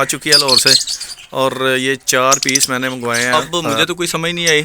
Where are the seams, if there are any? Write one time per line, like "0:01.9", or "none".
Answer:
0:03.3